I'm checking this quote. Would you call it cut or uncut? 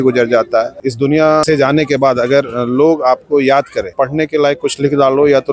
cut